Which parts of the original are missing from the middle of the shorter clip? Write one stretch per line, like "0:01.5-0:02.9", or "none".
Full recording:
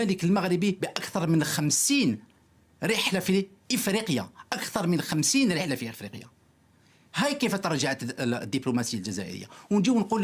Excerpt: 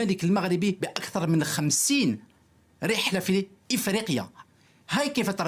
0:04.4-0:06.6

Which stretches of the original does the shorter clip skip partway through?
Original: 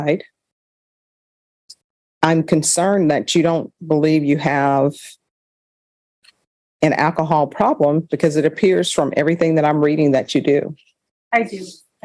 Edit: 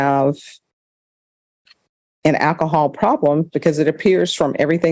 none

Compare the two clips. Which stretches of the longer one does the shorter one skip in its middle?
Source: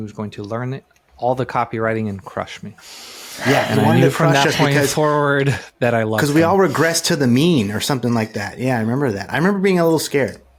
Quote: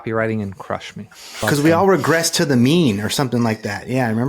0:03.1-0:06.1

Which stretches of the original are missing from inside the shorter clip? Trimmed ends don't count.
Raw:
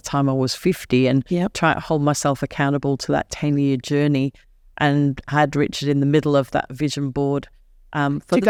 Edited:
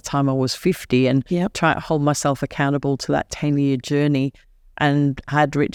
none

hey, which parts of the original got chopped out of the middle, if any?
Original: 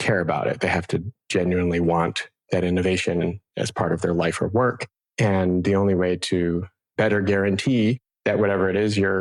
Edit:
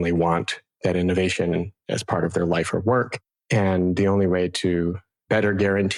none

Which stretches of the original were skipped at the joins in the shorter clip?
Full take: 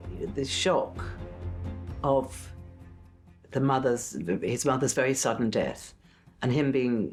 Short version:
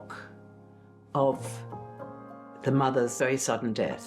0:04.0-0:04.9

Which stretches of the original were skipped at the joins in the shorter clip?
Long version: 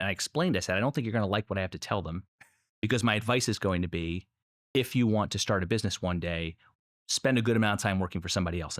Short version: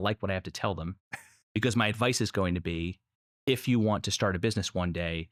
none

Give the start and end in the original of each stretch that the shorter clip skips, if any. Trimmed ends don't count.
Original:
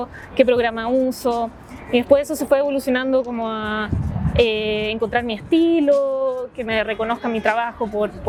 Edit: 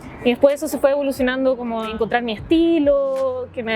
0:03.6-0:04.9

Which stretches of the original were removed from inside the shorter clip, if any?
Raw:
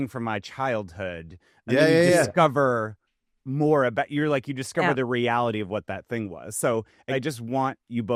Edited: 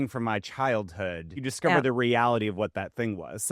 0:01.4-0:04.6

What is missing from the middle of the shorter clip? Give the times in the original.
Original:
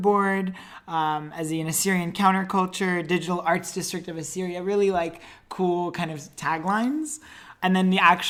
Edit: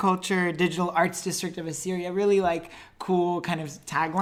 none

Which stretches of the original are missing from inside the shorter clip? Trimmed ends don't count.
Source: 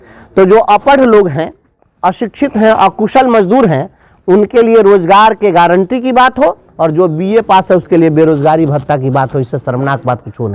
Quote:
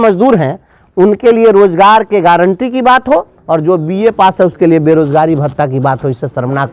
none

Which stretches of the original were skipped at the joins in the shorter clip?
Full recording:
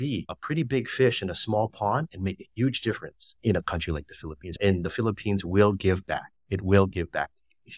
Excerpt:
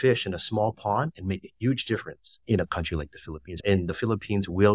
none

